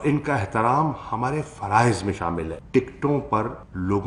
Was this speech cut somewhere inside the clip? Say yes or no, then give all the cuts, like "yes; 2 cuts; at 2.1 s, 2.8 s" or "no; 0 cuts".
no; 0 cuts